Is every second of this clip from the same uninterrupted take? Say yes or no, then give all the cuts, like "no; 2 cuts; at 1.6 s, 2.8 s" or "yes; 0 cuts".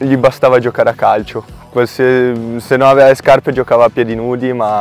yes; 0 cuts